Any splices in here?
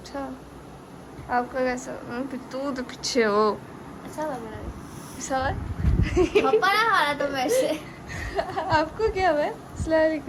no; 0 cuts

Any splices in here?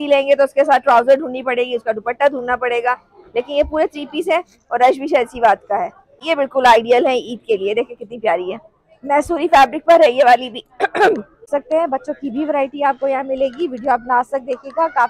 yes; 2 cuts; at 6.2 s, 11.5 s

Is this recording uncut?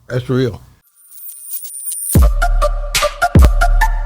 no; 1 cut; at 0.9 s

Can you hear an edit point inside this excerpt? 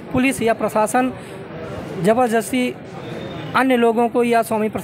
no; 0 cuts

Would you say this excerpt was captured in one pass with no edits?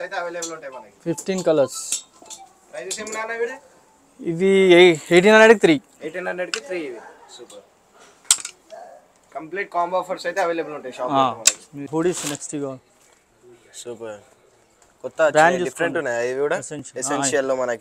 no; 1 cut; at 11.8 s

